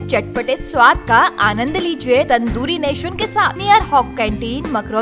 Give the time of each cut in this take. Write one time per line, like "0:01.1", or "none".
0:02.3
0:03.6